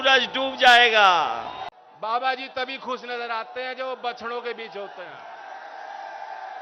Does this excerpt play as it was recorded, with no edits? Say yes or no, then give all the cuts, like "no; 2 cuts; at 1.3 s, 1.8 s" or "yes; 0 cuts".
no; 1 cut; at 1.7 s